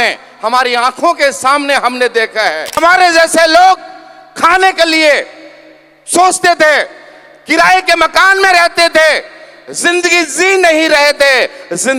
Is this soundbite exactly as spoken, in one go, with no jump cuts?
no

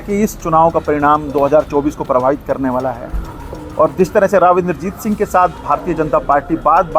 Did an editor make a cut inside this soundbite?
no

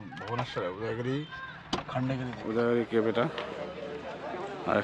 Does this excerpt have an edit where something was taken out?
yes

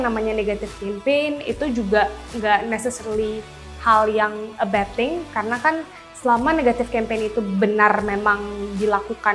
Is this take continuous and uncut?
yes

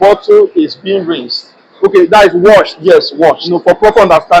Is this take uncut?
yes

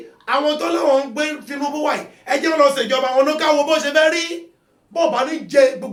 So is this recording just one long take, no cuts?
yes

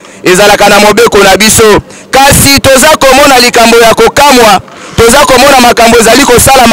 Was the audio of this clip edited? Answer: no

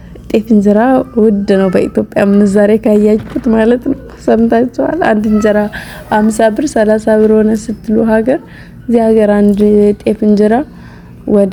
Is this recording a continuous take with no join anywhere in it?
yes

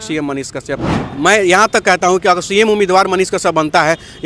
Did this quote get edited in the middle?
yes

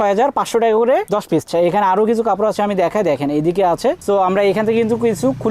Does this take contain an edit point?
yes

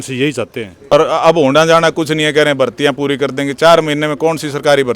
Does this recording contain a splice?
yes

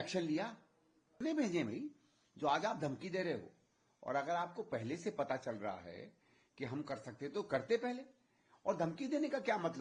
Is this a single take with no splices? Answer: no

